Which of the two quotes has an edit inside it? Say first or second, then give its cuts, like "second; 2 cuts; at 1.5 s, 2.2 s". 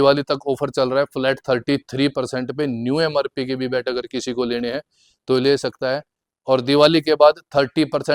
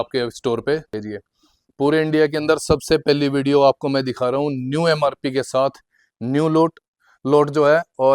second; 1 cut; at 0.9 s